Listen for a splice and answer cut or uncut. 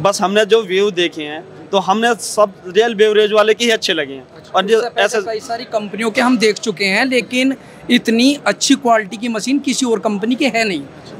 uncut